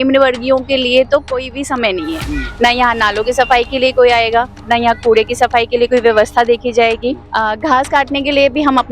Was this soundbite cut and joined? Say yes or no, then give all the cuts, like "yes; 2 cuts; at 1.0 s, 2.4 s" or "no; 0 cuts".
yes; 1 cut; at 7.2 s